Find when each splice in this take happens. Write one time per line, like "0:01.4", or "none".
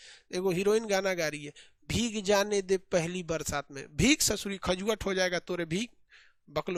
none